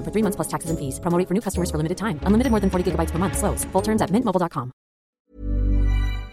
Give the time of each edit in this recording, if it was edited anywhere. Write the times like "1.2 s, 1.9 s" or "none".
5.2 s